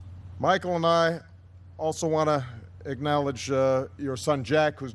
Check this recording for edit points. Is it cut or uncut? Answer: uncut